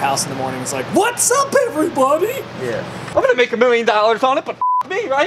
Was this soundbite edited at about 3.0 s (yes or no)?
yes